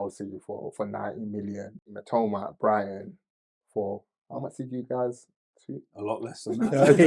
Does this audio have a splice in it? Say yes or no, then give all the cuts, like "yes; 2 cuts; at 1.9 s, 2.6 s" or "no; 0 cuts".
yes; 1 cut; at 1.9 s